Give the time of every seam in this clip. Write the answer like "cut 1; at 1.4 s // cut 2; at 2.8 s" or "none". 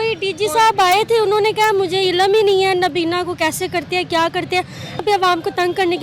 cut 1; at 5.0 s